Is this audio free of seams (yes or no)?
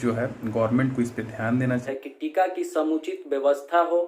no